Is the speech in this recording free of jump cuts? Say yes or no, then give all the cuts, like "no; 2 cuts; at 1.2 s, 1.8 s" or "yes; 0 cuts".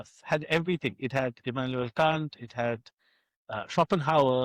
yes; 0 cuts